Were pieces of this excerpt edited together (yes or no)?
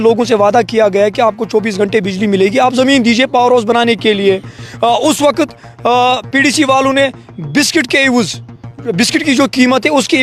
no